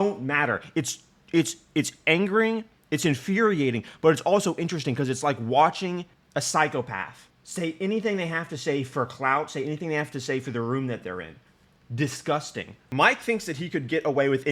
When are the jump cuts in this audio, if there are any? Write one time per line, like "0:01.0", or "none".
0:12.9